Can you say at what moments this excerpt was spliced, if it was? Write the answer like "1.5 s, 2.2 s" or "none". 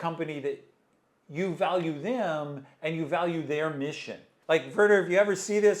4.3 s